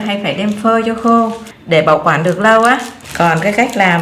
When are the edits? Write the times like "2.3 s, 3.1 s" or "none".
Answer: 3.0 s